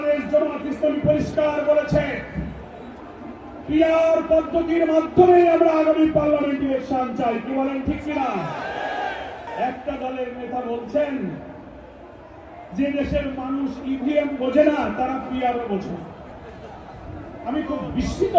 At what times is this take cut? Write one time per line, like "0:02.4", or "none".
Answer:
0:09.5